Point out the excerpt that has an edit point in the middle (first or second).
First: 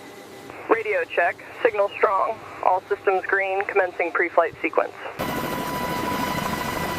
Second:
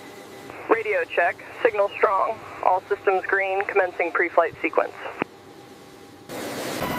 first